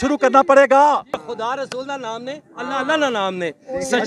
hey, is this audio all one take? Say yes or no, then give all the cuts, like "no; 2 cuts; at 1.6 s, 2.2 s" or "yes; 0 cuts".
no; 1 cut; at 1.2 s